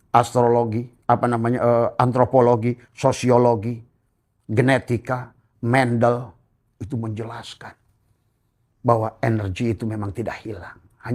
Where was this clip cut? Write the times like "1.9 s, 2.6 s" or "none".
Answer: none